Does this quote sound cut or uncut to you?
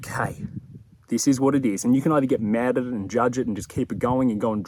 uncut